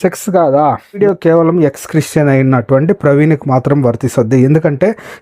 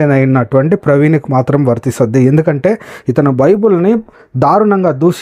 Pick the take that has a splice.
first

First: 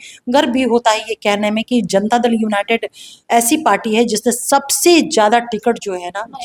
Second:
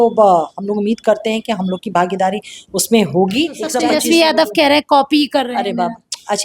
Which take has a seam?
second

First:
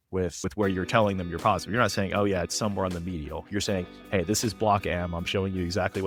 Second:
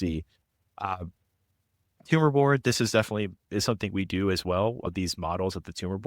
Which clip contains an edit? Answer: second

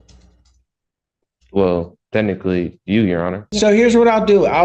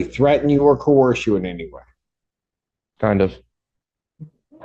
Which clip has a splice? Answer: first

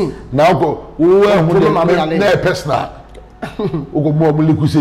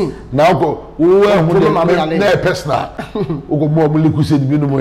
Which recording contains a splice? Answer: second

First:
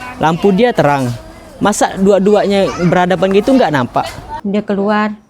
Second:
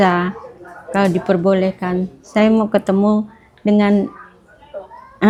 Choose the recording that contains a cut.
first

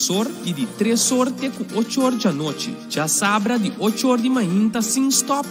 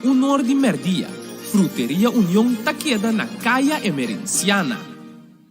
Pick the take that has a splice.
second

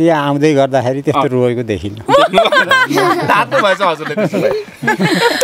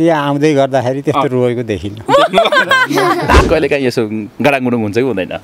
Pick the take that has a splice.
second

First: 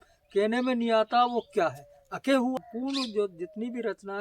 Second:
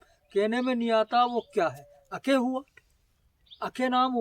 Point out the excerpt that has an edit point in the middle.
first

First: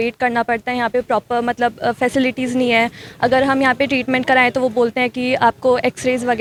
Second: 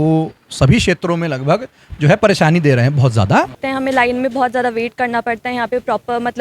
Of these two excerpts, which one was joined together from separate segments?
second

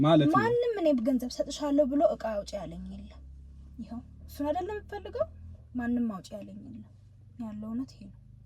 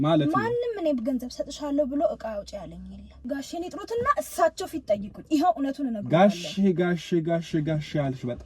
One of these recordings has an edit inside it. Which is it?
second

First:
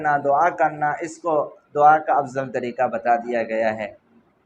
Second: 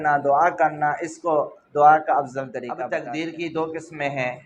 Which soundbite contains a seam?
second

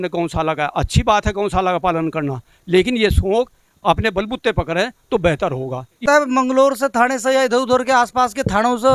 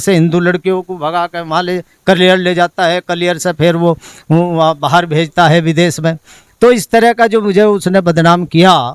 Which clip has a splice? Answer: first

